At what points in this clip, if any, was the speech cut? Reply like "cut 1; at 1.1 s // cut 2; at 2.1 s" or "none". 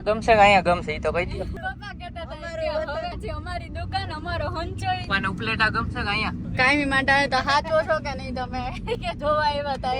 cut 1; at 1.6 s // cut 2; at 3.2 s // cut 3; at 5.1 s // cut 4; at 6.5 s